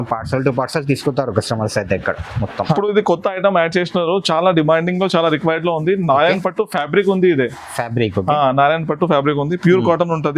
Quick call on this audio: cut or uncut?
cut